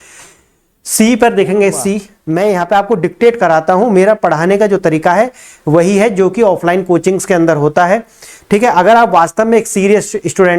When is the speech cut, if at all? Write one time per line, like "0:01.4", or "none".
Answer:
0:02.1